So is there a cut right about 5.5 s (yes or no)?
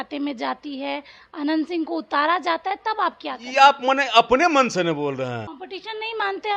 yes